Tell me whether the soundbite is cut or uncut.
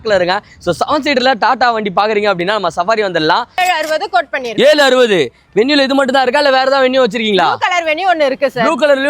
cut